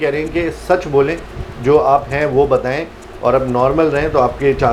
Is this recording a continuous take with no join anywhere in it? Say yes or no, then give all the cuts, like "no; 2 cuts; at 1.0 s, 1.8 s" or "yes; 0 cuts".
yes; 0 cuts